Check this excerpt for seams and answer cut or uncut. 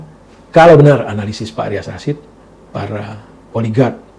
uncut